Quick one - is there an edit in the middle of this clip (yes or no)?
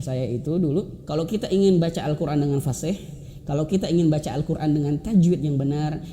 yes